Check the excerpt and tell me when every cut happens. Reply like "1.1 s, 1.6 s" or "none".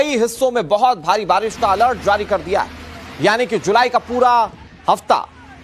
none